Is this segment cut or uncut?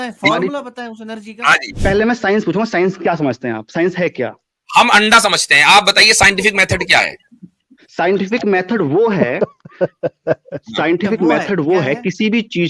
cut